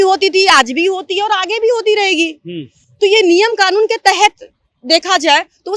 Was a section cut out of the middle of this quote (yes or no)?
no